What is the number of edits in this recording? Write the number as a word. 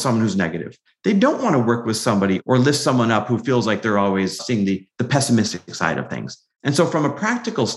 two